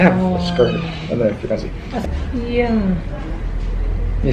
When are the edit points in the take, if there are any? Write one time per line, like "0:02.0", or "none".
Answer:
0:02.0